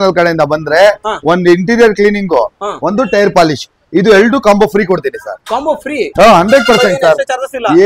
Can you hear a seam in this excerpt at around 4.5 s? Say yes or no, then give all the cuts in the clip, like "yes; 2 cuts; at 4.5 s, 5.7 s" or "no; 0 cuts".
no; 0 cuts